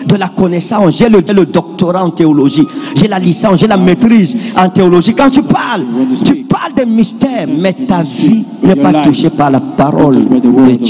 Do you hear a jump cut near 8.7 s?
no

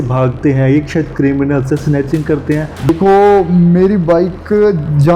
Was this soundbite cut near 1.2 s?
no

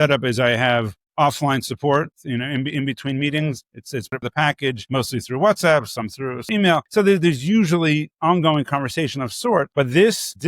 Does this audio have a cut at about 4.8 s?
yes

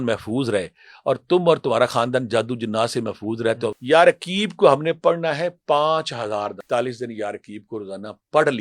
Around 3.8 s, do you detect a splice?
yes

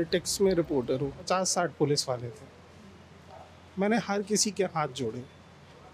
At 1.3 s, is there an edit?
yes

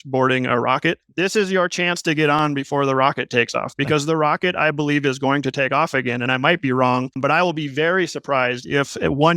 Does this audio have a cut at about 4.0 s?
no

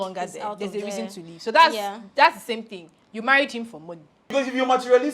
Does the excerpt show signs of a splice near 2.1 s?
no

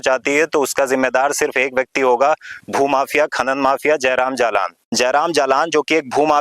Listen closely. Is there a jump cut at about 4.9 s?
yes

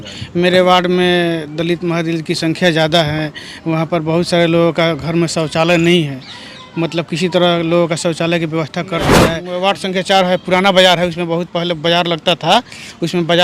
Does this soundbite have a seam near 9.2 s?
yes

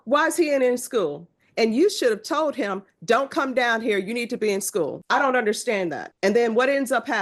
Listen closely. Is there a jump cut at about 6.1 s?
yes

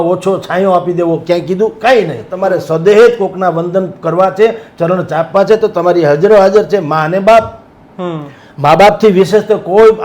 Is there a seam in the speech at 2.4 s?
yes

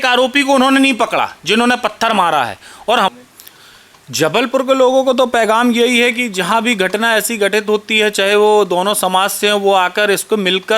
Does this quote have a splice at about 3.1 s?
yes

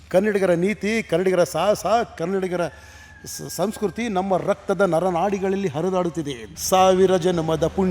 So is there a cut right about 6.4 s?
yes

